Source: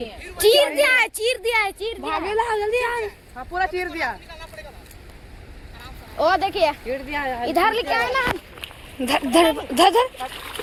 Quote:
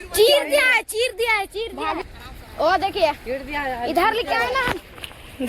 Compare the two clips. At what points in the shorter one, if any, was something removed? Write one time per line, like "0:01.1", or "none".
0:02.0